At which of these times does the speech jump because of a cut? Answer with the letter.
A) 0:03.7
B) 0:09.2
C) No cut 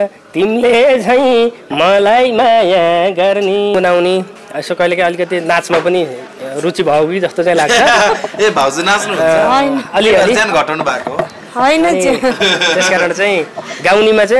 A